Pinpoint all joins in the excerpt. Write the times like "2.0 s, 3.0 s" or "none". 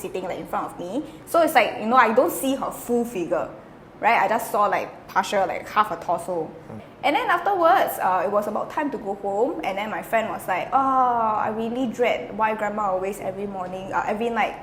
6.8 s